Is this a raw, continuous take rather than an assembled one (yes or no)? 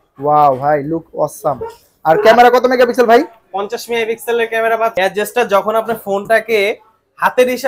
no